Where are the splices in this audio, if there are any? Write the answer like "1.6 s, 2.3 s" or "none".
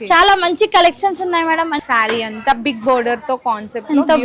1.8 s